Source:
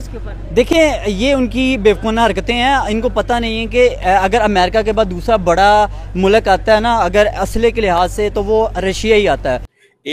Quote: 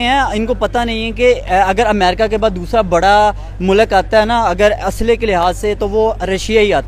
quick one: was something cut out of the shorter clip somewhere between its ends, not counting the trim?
no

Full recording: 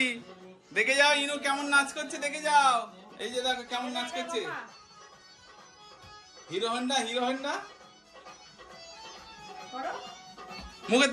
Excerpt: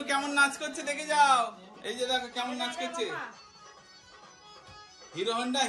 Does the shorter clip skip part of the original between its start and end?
no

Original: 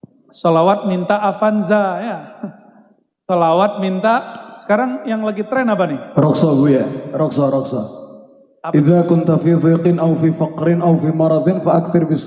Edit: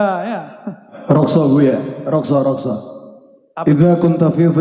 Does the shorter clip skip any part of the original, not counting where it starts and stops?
yes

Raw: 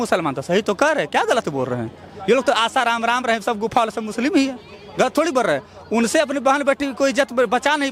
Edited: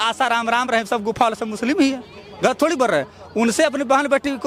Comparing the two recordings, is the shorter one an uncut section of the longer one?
yes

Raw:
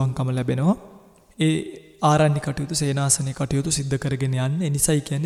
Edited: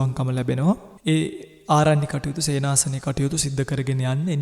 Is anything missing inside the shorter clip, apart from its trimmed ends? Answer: yes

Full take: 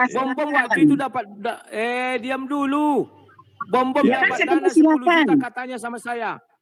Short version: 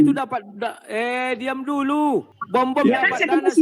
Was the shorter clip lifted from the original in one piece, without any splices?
no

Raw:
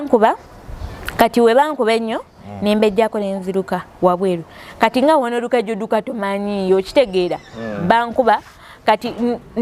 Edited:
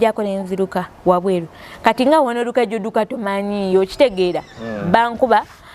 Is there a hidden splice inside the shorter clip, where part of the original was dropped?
no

